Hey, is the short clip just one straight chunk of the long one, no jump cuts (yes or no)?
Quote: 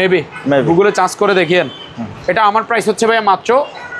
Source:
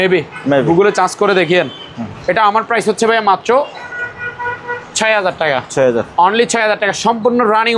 yes